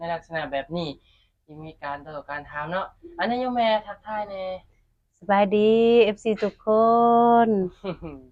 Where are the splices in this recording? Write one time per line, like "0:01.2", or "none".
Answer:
none